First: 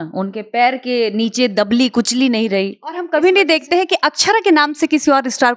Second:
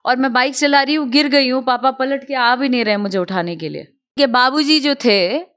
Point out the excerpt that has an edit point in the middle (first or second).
second